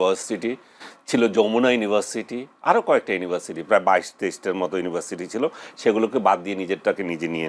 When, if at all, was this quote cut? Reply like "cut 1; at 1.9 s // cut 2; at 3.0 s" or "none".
none